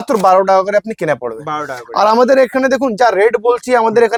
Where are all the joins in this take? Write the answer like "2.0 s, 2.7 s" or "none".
none